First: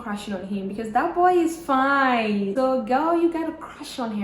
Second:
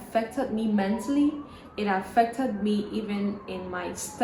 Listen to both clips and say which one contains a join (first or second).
first